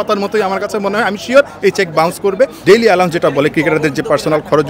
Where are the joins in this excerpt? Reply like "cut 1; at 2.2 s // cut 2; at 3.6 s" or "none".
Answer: cut 1; at 2.6 s